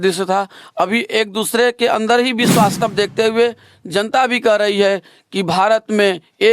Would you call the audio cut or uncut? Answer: cut